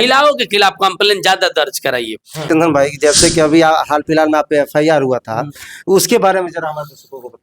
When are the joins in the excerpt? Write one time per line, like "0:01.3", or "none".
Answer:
0:02.5